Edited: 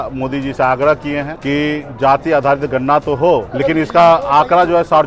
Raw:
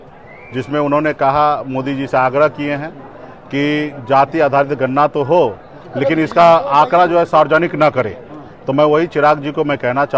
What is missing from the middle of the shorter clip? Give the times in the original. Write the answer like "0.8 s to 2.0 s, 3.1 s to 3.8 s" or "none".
2.9 s to 3.4 s, 5.6 s to 5.9 s